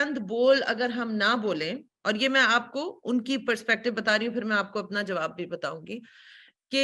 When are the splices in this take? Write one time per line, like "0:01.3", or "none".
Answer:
none